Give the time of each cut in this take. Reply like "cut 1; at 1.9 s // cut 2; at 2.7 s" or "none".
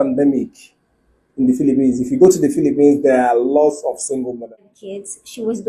cut 1; at 4.4 s